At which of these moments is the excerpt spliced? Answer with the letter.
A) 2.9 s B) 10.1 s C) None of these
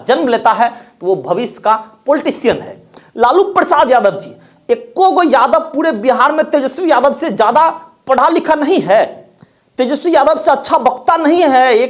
C